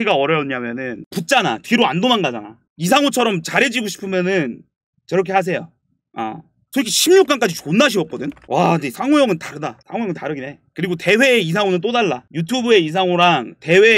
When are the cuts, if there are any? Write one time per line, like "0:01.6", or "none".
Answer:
none

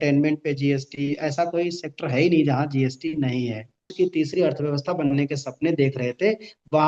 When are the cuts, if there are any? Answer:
0:03.9

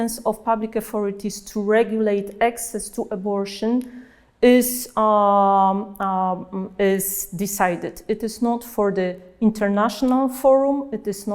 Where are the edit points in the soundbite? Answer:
none

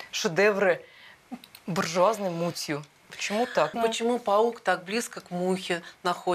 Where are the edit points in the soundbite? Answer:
0:03.7

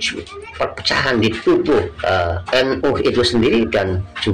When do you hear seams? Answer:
0:01.9

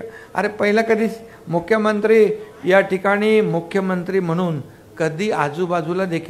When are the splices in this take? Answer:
none

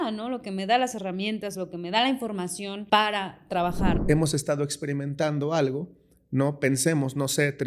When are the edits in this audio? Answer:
0:02.7
0:04.0

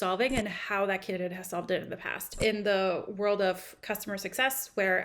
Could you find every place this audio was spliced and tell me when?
0:02.4

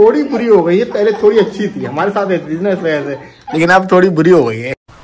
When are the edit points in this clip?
none

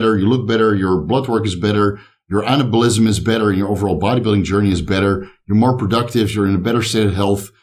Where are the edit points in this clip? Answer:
none

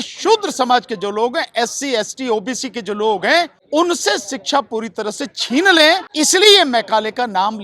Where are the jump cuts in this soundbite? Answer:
0:03.6
0:06.1

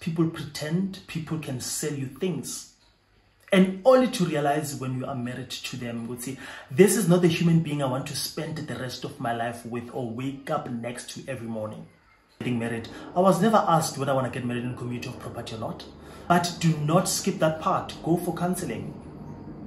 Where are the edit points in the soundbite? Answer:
0:12.4
0:16.1

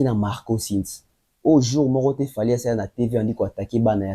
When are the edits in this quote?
none

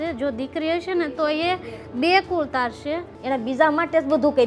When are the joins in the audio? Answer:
0:03.1

